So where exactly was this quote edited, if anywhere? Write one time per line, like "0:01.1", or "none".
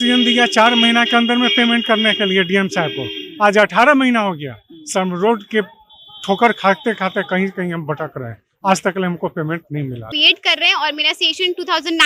0:10.2